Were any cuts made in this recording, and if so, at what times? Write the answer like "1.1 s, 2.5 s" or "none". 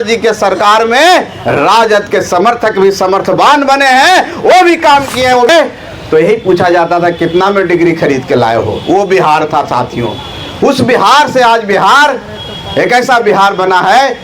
5.5 s

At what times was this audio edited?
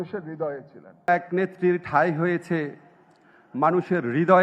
1.1 s

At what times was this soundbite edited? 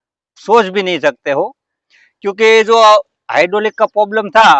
none

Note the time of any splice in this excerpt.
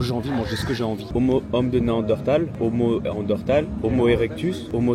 1.1 s

